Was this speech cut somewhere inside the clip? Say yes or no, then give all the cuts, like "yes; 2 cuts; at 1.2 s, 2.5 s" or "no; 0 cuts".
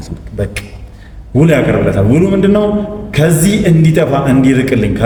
no; 0 cuts